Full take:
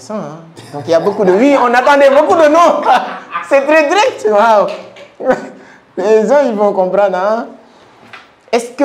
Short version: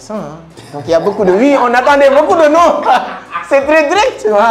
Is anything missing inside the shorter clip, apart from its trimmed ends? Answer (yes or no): no